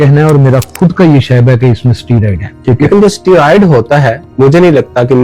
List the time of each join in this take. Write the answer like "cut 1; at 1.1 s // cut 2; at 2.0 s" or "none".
cut 1; at 2.4 s // cut 2; at 4.2 s

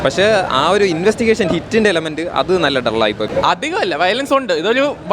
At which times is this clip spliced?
cut 1; at 3.2 s

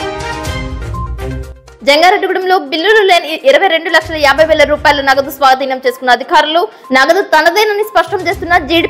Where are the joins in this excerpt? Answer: none

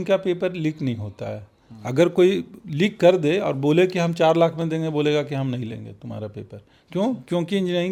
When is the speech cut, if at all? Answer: none

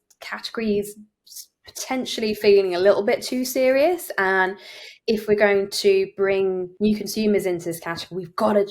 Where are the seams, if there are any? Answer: cut 1; at 6.7 s

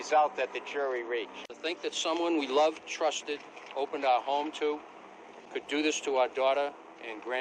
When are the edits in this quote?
cut 1; at 1.6 s

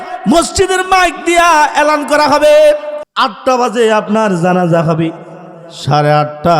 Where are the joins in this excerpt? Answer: cut 1; at 3.0 s

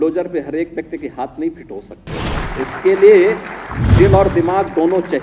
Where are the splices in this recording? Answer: cut 1; at 2.4 s

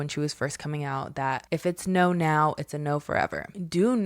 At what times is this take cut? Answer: cut 1; at 1.4 s

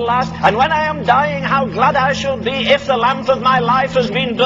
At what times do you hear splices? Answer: none

